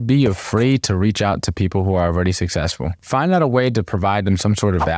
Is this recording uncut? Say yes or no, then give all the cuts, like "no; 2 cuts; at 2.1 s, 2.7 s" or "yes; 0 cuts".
yes; 0 cuts